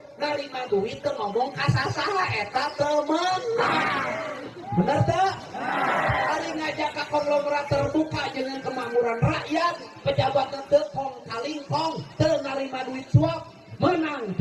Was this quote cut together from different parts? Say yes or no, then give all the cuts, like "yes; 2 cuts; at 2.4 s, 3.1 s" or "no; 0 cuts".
no; 0 cuts